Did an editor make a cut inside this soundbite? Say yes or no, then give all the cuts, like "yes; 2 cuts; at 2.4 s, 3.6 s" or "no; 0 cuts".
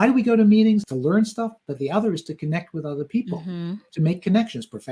yes; 1 cut; at 0.9 s